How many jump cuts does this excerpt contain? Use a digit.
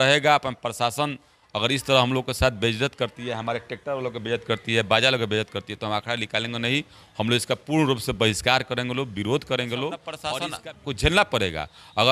1